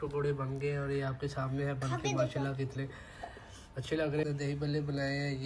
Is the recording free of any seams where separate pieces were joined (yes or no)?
no